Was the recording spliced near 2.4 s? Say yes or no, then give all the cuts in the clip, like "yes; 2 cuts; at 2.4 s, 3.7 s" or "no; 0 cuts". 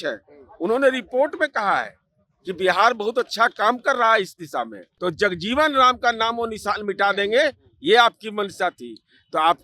no; 1 cut; at 4.8 s